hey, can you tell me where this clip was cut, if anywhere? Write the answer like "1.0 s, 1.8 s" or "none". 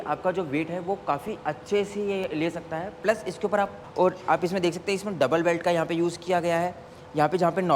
3.8 s